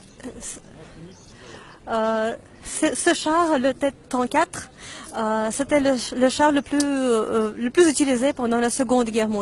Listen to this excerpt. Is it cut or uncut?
uncut